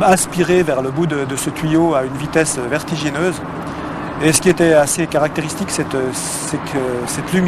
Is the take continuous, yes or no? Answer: yes